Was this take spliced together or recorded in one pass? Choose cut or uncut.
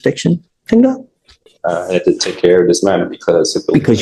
uncut